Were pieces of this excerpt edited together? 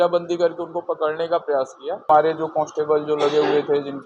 yes; 1 cut; at 2.1 s

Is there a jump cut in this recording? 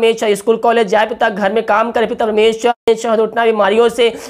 yes; 1 cut; at 2.9 s

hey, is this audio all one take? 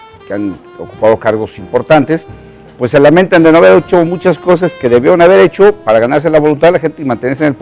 no; 1 cut; at 2.2 s

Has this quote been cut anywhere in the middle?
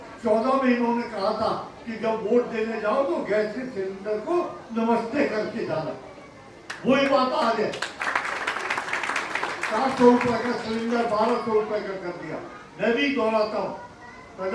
no; 0 cuts

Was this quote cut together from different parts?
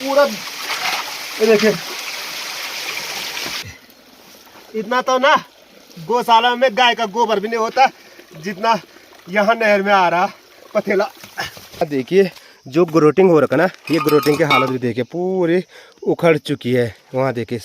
yes; 2 cuts; at 3.6 s, 11.8 s

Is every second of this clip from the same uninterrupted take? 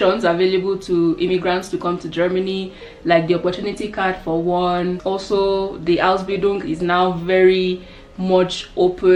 yes; 0 cuts

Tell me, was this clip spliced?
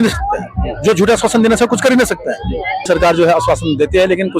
yes; 1 cut; at 2.9 s

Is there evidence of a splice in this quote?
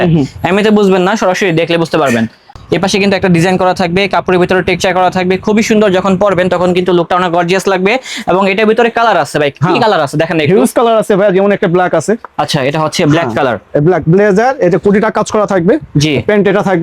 yes; 1 cut; at 2.5 s

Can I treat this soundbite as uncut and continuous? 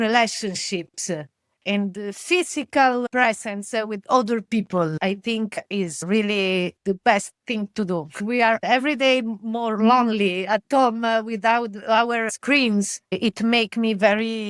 no; 2 cuts; at 4.9 s, 8.2 s

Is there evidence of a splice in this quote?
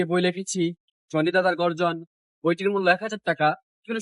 no; 0 cuts

